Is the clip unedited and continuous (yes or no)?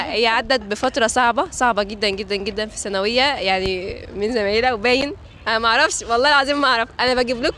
yes